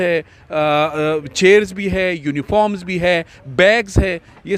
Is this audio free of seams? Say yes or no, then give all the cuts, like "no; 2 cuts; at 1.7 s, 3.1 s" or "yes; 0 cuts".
yes; 0 cuts